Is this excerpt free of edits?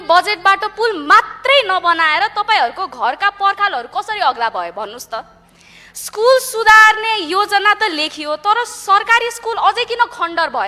yes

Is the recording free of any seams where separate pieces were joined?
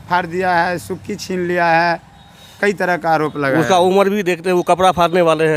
yes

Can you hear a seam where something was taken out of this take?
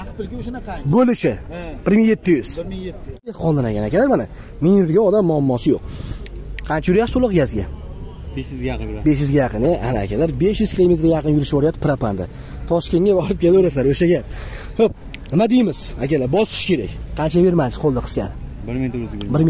yes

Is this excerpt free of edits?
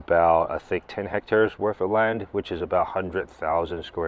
yes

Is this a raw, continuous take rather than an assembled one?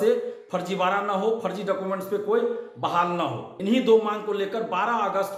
no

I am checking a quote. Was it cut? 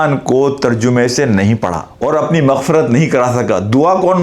yes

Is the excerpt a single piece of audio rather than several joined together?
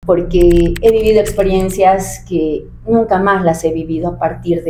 yes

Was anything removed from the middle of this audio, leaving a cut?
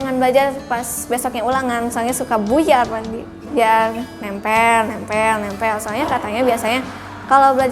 no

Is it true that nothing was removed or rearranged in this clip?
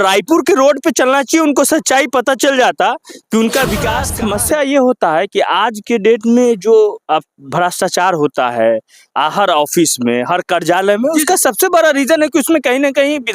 no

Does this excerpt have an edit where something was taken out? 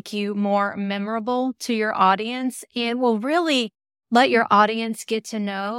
no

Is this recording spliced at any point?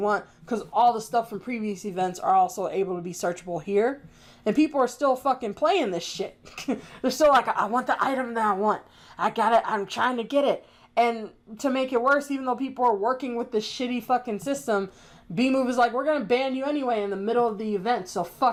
no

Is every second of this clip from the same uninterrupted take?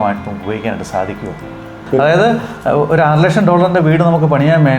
no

